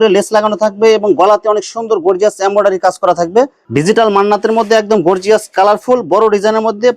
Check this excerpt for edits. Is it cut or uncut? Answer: cut